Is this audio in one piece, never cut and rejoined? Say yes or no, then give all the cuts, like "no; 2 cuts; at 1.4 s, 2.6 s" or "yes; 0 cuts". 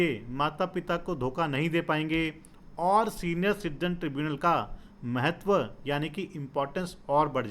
yes; 0 cuts